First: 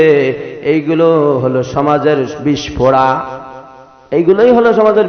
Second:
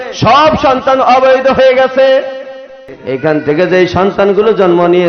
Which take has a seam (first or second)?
second